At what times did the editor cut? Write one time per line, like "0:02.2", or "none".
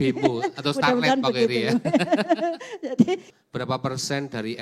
0:03.3